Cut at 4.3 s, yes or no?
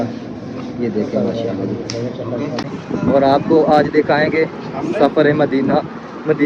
no